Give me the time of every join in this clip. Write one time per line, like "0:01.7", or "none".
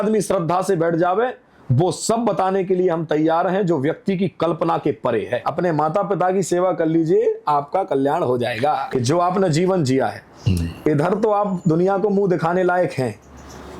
0:05.4
0:08.8